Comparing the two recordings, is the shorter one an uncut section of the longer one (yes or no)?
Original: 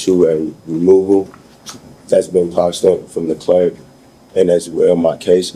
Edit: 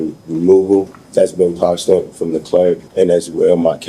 no